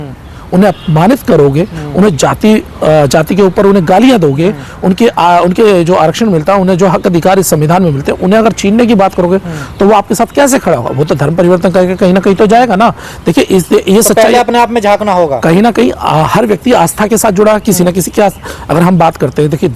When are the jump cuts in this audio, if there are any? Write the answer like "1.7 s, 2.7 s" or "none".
none